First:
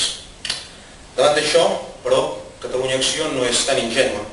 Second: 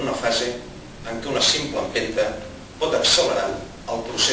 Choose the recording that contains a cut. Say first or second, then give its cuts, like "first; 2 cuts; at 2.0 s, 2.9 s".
second; 1 cut; at 2.6 s